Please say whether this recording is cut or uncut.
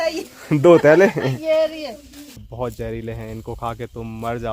cut